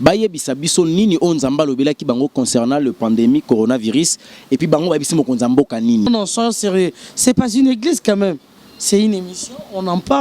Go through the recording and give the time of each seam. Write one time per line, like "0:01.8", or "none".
0:06.1